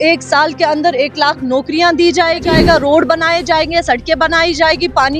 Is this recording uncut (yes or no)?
no